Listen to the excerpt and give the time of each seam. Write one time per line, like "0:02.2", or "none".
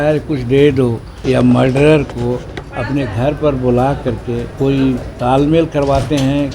0:01.1
0:04.5